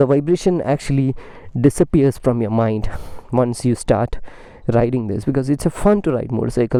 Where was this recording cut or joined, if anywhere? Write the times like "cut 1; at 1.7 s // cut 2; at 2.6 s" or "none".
none